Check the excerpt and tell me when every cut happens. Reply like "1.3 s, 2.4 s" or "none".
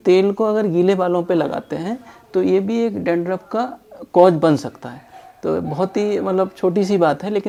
none